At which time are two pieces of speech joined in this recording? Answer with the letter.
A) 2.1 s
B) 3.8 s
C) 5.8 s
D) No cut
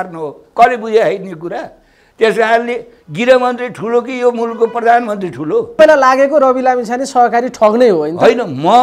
C